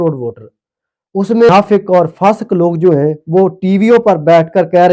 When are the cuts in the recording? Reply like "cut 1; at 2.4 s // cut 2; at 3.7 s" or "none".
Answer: cut 1; at 1.5 s